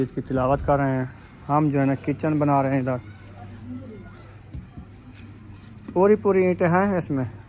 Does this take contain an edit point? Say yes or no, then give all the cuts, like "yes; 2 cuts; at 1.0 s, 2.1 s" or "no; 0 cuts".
no; 0 cuts